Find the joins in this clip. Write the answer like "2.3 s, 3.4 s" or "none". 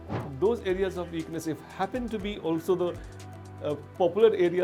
none